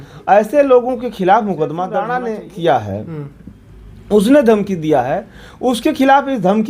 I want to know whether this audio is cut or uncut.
cut